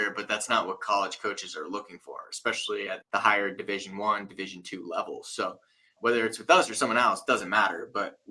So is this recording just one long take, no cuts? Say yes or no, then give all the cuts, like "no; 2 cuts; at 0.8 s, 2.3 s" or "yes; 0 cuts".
no; 2 cuts; at 3.0 s, 5.9 s